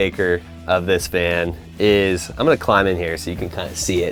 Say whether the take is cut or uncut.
uncut